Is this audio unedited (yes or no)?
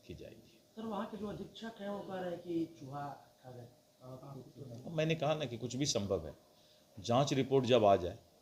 yes